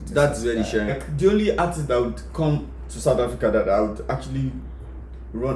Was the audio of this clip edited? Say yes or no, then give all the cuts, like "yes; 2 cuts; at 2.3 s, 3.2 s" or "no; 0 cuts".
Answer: yes; 1 cut; at 1.0 s